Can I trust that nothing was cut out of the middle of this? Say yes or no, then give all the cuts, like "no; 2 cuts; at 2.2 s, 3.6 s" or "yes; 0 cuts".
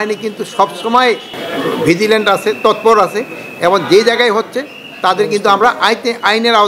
yes; 0 cuts